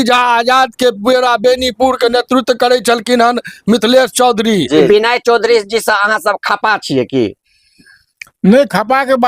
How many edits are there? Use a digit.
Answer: 1